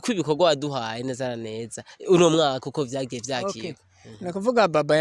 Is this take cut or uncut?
uncut